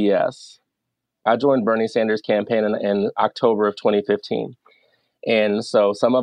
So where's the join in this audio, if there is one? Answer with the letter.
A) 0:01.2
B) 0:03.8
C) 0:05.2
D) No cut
A